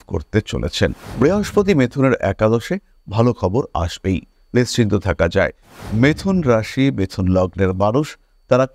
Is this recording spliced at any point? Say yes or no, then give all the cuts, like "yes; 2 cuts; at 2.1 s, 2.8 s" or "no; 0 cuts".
yes; 2 cuts; at 1.0 s, 5.7 s